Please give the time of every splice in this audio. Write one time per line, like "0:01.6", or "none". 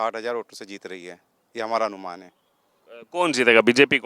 none